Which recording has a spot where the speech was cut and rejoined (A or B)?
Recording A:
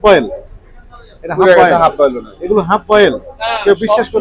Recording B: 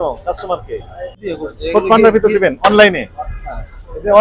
B